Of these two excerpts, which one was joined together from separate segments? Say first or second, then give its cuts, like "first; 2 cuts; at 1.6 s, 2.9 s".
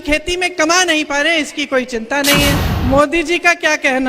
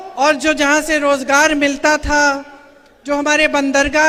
first; 1 cut; at 2.7 s